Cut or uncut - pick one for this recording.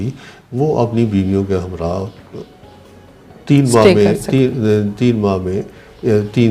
uncut